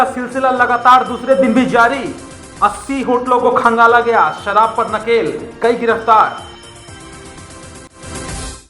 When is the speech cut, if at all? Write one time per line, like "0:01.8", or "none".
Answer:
0:07.8